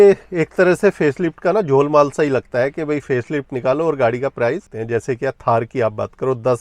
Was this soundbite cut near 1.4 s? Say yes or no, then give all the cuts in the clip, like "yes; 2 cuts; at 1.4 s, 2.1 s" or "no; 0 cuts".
no; 1 cut; at 4.7 s